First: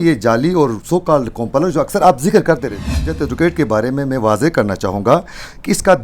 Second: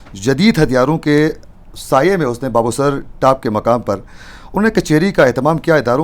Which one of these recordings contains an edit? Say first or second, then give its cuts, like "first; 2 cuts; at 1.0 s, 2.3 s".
first; 1 cut; at 2.9 s